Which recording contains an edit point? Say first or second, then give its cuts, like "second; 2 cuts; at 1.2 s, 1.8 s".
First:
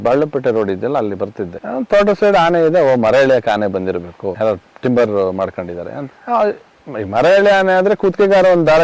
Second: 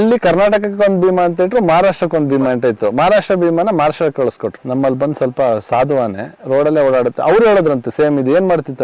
second; 1 cut; at 4.6 s